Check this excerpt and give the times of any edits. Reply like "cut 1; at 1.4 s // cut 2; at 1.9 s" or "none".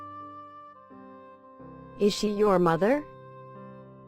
cut 1; at 2.0 s // cut 2; at 3.0 s